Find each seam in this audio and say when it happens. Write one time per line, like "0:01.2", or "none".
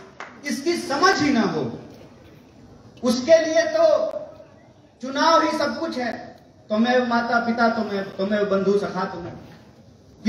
none